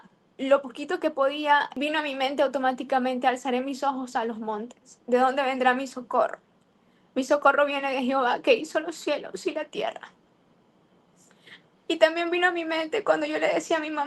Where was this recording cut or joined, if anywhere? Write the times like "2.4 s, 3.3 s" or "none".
1.7 s